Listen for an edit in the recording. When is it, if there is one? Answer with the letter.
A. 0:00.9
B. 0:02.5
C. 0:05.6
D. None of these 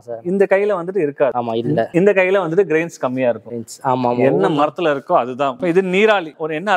C